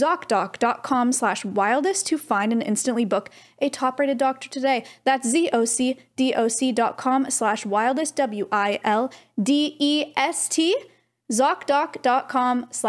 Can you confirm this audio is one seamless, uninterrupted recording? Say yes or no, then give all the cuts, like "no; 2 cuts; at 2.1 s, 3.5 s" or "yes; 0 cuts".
yes; 0 cuts